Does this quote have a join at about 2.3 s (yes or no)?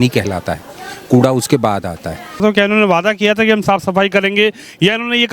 yes